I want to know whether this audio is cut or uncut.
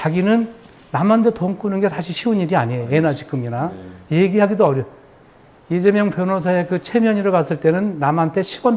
uncut